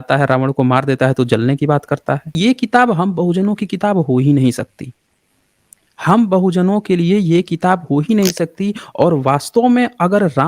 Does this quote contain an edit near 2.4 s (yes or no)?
yes